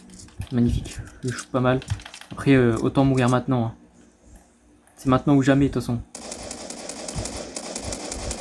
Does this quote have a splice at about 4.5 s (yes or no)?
no